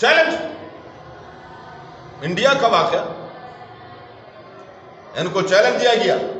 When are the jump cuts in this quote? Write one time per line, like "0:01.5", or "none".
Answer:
none